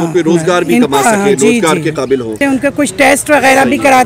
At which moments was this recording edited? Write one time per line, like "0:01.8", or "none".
0:02.4